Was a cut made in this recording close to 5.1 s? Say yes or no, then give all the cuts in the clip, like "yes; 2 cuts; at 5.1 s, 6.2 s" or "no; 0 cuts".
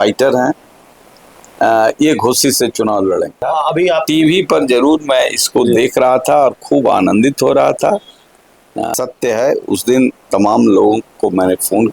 no; 2 cuts; at 3.4 s, 8.9 s